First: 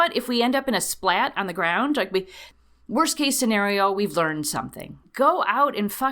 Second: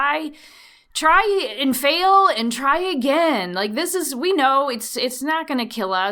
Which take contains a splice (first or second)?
first